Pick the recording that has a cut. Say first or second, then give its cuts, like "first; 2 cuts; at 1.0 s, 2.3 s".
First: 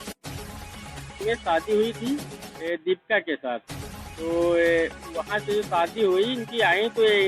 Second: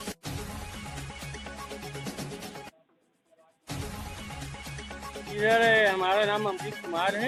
first; 1 cut; at 1.2 s